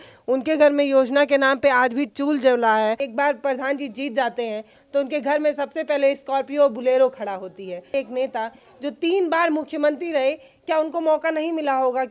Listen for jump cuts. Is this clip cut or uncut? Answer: cut